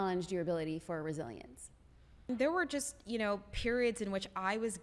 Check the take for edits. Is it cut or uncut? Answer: cut